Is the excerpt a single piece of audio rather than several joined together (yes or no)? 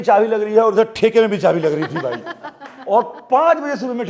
yes